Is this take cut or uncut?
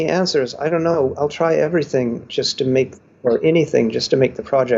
uncut